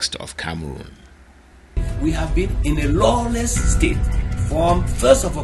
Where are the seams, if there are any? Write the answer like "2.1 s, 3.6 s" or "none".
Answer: 1.9 s